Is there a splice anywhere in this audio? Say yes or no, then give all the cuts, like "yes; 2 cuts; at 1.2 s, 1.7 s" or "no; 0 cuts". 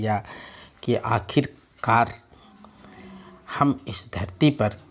no; 0 cuts